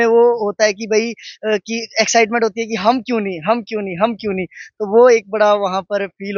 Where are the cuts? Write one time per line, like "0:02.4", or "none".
none